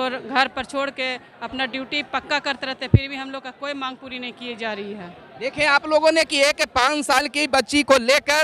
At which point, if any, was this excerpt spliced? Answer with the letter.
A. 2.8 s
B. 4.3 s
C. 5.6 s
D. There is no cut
D